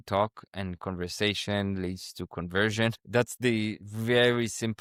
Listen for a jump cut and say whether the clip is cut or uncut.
uncut